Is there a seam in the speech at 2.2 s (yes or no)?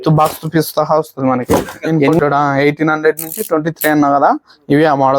yes